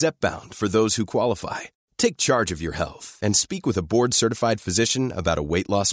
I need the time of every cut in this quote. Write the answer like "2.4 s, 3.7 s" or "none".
none